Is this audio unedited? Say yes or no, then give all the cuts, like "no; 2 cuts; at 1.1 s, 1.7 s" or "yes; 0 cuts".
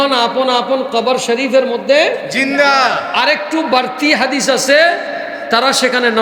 yes; 0 cuts